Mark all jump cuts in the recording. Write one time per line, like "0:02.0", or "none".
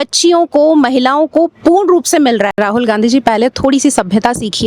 0:02.5